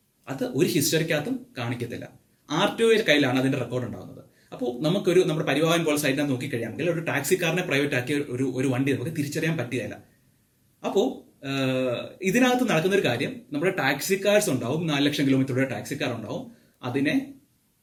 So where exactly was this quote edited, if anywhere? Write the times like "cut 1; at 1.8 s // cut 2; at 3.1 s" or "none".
none